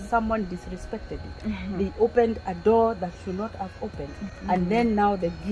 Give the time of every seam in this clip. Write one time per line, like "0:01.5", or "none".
0:04.3